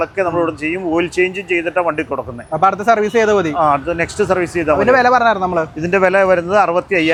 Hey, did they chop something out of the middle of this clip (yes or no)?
no